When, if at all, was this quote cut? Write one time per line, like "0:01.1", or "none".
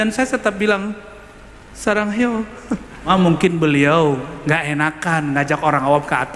0:03.1